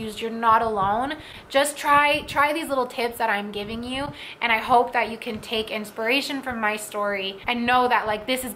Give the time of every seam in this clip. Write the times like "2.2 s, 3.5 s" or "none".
7.3 s